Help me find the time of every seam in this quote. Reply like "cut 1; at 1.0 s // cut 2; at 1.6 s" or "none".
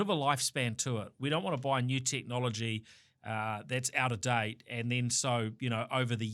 none